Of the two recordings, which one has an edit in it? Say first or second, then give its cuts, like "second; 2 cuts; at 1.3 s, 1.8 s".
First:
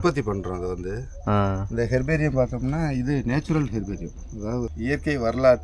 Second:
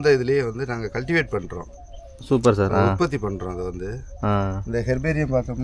first; 1 cut; at 4.7 s